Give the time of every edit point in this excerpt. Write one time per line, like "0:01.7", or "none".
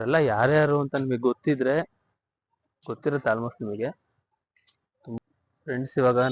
0:05.3